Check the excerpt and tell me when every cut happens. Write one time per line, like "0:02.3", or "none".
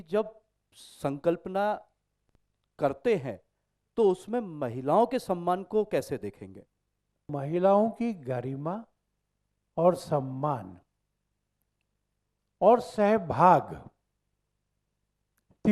0:07.3